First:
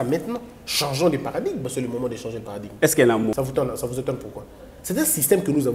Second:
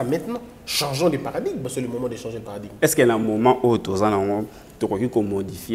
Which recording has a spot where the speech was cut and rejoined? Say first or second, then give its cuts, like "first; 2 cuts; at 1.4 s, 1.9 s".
first; 1 cut; at 3.3 s